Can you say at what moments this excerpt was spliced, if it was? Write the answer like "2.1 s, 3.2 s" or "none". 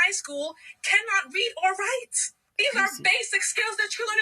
1.7 s